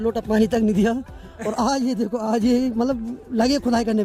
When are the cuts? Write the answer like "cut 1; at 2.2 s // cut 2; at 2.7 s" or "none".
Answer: none